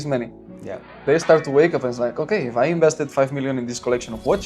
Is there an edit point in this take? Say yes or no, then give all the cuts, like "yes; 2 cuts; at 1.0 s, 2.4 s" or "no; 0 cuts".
yes; 1 cut; at 1.0 s